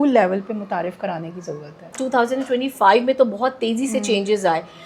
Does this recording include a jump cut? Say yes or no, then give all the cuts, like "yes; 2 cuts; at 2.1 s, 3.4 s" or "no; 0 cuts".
yes; 1 cut; at 2.0 s